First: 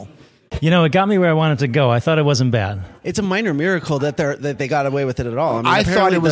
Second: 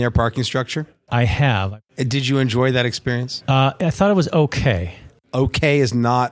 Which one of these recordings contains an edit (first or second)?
second